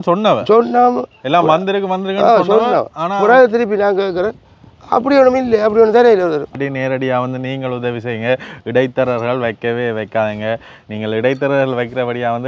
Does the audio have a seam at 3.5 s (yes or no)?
no